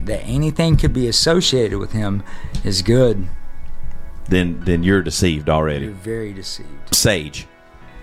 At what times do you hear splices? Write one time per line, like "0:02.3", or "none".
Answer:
0:06.9